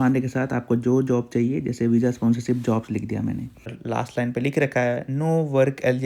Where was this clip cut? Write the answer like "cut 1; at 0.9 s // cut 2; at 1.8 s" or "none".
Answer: cut 1; at 3.7 s